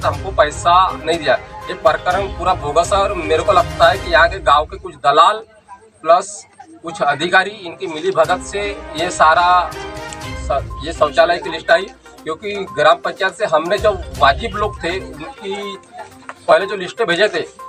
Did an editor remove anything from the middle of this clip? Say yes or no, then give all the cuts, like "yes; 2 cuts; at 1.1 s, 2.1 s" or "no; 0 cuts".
no; 0 cuts